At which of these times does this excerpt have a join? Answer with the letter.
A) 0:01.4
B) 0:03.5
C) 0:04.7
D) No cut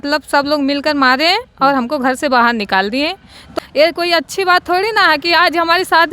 B